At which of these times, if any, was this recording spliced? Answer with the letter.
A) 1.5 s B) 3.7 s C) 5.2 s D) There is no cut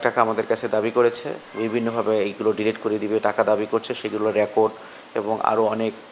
A